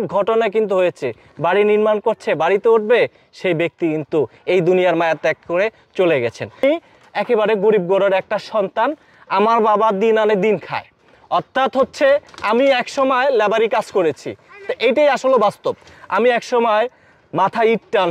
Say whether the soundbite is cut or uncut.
cut